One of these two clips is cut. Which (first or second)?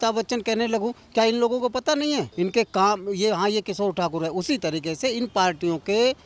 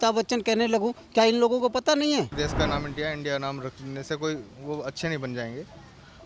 second